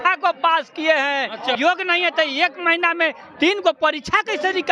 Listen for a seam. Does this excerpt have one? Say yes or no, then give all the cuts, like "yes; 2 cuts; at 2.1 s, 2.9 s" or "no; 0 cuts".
yes; 1 cut; at 1.5 s